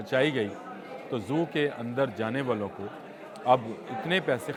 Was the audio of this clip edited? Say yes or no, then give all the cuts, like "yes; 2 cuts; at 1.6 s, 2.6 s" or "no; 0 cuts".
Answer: no; 0 cuts